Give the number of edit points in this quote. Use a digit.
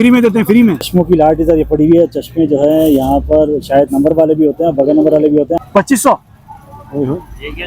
2